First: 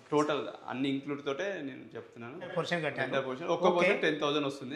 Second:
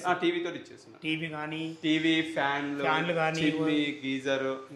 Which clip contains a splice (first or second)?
first